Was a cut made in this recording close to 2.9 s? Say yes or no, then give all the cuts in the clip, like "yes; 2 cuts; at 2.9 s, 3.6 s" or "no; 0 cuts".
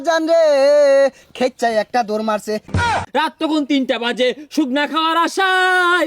yes; 1 cut; at 2.9 s